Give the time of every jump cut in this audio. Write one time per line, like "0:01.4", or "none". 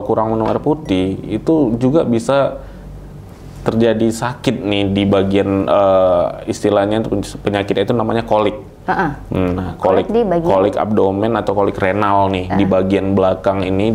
none